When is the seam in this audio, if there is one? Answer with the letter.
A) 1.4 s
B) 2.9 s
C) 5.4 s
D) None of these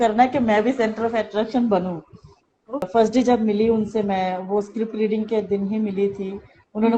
B